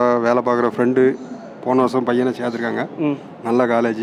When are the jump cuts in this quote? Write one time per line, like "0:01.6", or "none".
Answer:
none